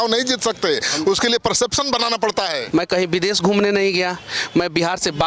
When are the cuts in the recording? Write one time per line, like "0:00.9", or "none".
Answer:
0:02.6